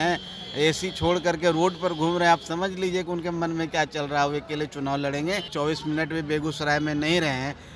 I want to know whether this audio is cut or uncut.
cut